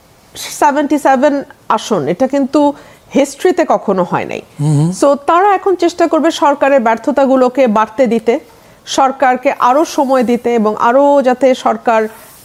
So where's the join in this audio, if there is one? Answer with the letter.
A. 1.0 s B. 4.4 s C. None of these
C